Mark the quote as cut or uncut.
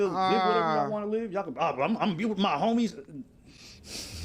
uncut